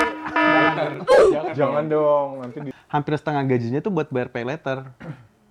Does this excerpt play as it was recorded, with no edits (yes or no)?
no